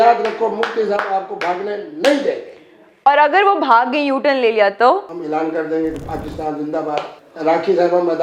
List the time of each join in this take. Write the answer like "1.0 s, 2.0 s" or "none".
5.1 s, 7.2 s